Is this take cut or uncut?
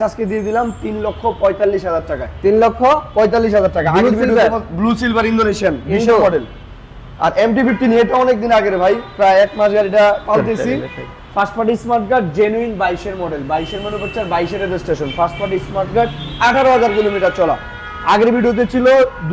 uncut